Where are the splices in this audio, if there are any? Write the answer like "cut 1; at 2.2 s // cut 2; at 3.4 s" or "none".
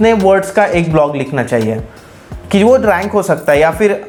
none